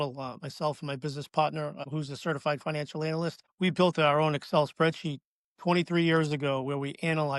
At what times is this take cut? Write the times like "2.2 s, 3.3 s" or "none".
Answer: none